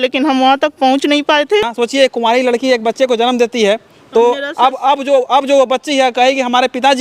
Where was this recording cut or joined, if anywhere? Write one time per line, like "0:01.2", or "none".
0:01.7

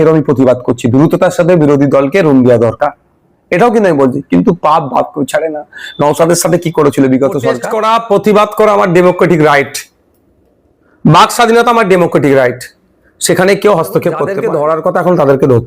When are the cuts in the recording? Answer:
0:07.6
0:14.4

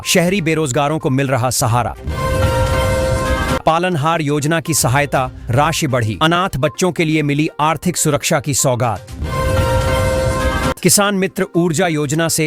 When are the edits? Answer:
0:02.0
0:03.6
0:09.2
0:10.8

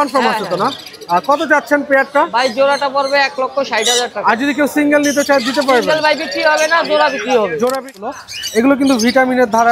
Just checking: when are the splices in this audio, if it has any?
0:08.1

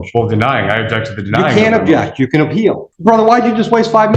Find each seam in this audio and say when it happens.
0:02.9

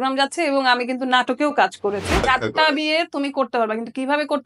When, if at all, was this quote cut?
0:02.2

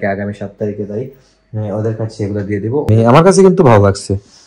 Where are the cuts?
0:02.9

